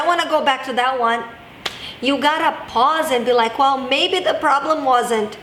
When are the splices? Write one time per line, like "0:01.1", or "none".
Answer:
none

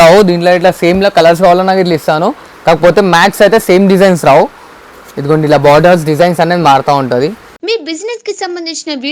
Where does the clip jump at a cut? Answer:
0:07.5

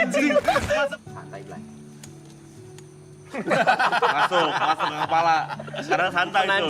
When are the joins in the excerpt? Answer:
0:00.9

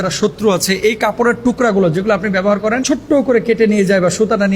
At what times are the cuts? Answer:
0:02.8

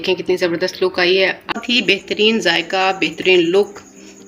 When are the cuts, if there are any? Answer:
0:01.6

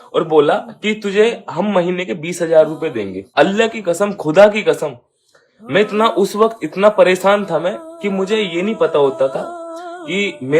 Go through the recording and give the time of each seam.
0:03.2

